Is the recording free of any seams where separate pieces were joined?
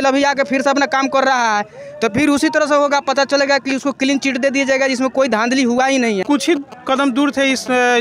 no; 1 cut; at 6.2 s

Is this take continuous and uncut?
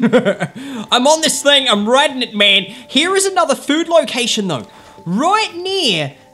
yes; 0 cuts

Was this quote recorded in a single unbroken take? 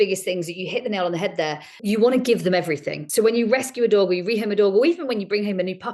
no; 2 cuts; at 1.7 s, 2.9 s

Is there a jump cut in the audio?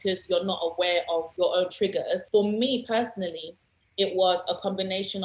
yes; 2 cuts; at 1.3 s, 2.2 s

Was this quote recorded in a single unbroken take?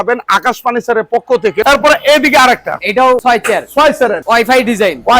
no; 3 cuts; at 1.6 s, 3.2 s, 4.2 s

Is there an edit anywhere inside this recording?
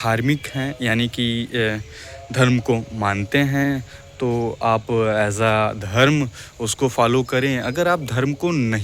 no; 0 cuts

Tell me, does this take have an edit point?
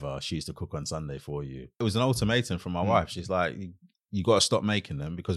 yes; 1 cut; at 1.8 s

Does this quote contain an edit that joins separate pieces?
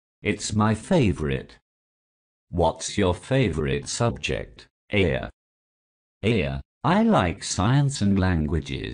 no; 0 cuts

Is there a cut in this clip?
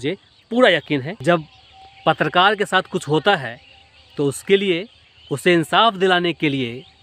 yes; 1 cut; at 1.1 s

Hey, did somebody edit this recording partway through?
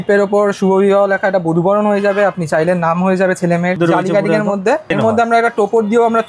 yes; 2 cuts; at 3.8 s, 4.9 s

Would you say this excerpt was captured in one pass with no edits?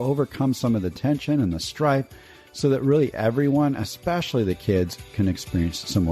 no; 1 cut; at 5.0 s

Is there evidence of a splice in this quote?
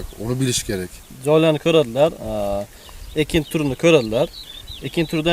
yes; 1 cut; at 1.0 s

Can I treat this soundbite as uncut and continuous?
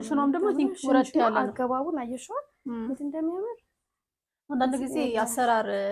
yes; 0 cuts

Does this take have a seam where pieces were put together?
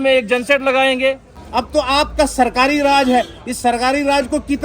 yes; 1 cut; at 1.4 s

